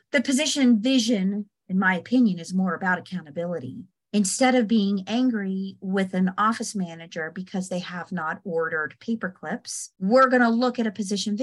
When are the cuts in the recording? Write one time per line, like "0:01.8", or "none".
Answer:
0:04.0
0:09.8